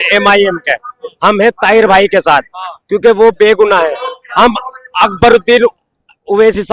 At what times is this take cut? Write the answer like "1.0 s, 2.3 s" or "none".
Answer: none